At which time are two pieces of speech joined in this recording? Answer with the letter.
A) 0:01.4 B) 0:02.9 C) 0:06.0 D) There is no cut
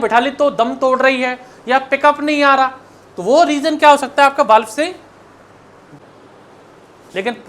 C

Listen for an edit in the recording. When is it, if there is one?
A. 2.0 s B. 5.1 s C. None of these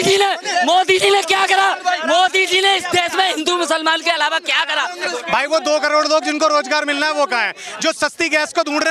B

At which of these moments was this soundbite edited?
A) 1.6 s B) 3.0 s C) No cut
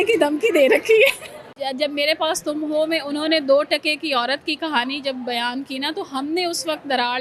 A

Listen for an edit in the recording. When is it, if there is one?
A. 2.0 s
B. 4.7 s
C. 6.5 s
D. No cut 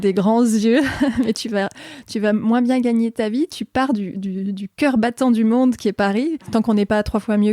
C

